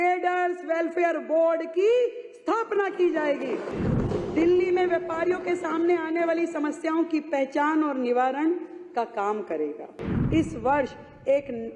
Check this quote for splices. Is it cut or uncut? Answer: cut